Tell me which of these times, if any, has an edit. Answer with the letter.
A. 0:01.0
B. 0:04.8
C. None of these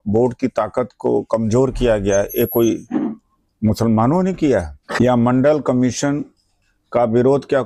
B